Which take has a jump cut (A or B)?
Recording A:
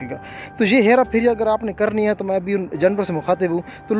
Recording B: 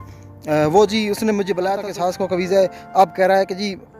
B